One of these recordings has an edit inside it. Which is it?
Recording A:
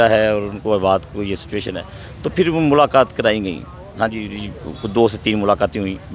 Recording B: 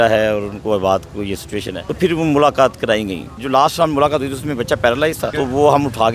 B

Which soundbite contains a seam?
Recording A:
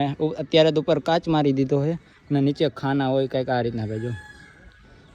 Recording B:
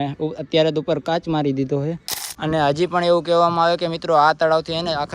B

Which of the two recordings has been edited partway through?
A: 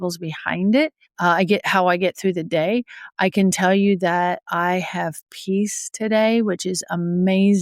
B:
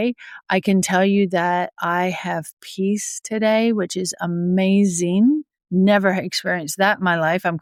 A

